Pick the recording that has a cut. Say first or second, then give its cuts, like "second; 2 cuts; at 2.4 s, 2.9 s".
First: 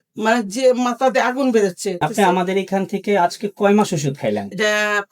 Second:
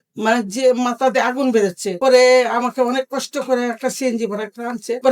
first; 1 cut; at 1.9 s